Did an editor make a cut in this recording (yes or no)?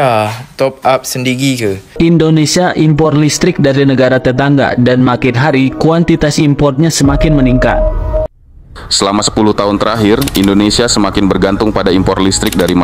yes